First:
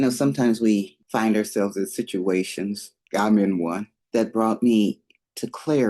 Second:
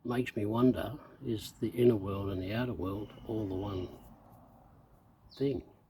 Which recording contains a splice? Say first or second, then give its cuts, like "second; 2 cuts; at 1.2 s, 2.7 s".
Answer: first; 3 cuts; at 1.0 s, 2.9 s, 3.9 s